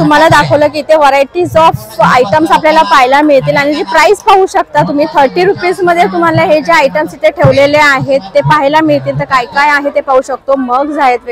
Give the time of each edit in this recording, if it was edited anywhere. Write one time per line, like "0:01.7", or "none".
none